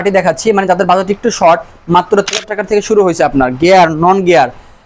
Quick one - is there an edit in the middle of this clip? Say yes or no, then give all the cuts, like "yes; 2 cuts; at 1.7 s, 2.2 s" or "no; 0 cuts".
yes; 1 cut; at 2.3 s